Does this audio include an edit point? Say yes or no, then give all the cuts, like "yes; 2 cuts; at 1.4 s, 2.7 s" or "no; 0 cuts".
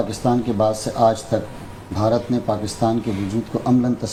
no; 0 cuts